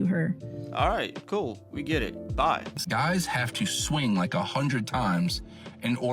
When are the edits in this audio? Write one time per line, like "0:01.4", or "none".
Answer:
0:02.8

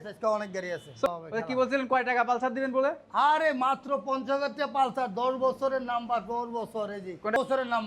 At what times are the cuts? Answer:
none

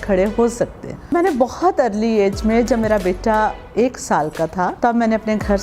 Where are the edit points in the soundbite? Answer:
0:01.1
0:04.7

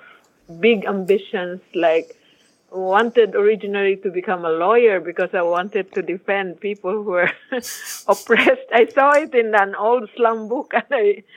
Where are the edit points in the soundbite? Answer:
none

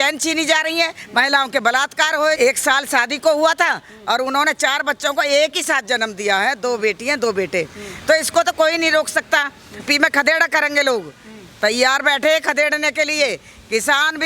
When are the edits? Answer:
0:02.4
0:09.8

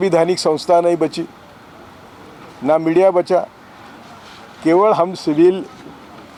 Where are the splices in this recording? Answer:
none

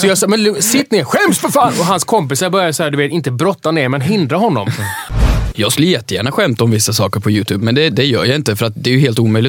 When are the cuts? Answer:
0:05.4

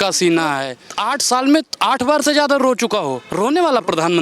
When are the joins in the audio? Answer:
0:03.2

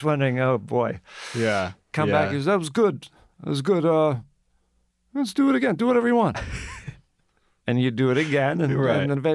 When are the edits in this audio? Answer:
0:01.9

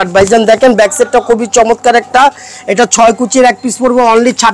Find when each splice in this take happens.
none

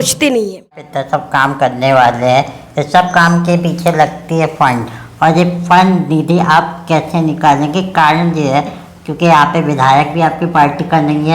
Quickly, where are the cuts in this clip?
0:00.9

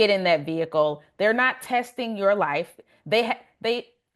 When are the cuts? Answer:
none

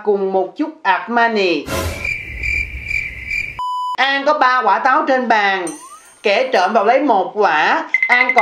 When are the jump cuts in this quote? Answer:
0:03.9

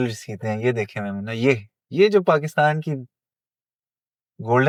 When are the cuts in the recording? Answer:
none

